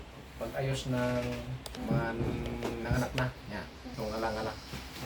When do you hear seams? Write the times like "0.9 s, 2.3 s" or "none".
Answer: 1.7 s, 3.8 s